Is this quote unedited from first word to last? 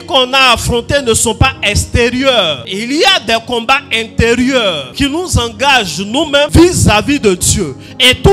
no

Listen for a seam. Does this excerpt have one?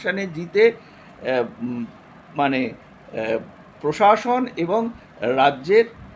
no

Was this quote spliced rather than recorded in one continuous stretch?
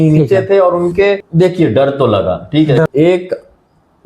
yes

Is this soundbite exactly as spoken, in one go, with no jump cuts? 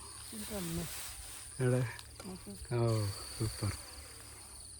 no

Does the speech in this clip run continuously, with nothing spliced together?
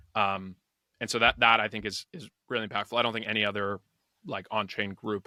yes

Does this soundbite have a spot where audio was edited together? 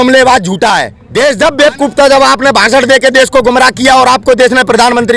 yes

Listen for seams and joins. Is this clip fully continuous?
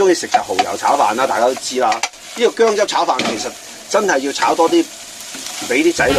yes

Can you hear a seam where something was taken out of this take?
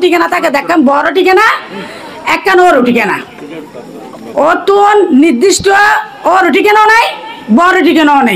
yes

